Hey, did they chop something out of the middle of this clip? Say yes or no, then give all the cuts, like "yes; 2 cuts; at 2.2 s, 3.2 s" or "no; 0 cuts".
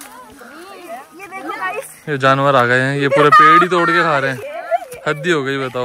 no; 0 cuts